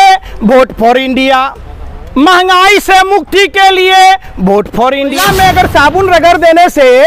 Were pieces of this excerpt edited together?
yes; 1 cut; at 5.1 s

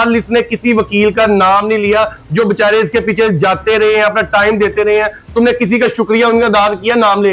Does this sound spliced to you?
no; 0 cuts

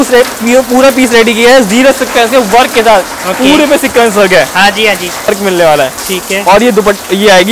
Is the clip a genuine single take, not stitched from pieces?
no; 1 cut; at 5.3 s

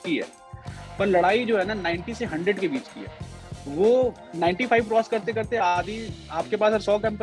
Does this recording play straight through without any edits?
yes; 0 cuts

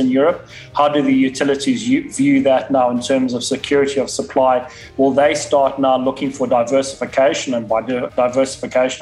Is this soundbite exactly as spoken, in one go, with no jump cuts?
yes; 0 cuts

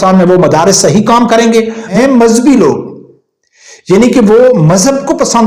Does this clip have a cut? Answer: yes; 1 cut; at 1.8 s

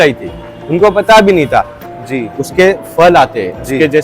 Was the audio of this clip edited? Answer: yes; 1 cut; at 1.8 s

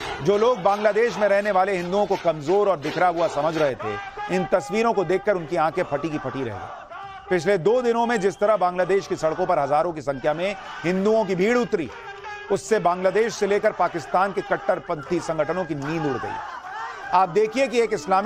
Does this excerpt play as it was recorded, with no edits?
no; 1 cut; at 14.6 s

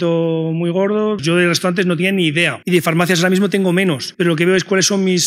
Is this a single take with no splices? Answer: no; 3 cuts; at 1.2 s, 2.6 s, 4.1 s

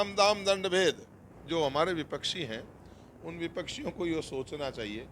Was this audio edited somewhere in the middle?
yes; 1 cut; at 1.3 s

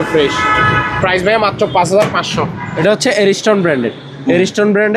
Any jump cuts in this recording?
yes; 1 cut; at 2.6 s

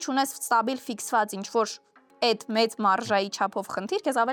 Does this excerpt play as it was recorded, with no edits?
yes; 0 cuts

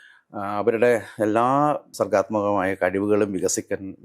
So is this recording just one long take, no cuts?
no; 1 cut; at 1.9 s

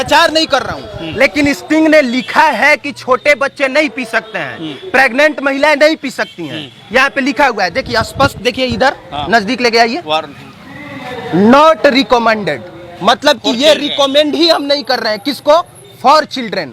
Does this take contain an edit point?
no; 0 cuts

